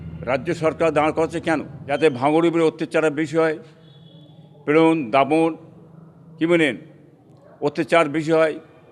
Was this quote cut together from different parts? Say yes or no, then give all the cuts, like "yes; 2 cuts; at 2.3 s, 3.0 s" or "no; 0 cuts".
yes; 1 cut; at 1.8 s